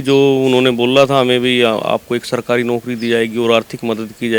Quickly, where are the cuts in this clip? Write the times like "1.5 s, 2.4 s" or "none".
none